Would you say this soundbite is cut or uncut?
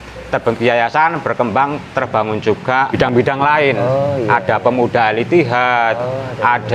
cut